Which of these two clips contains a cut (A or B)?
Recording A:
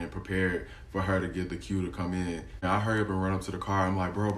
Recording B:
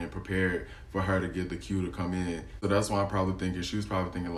A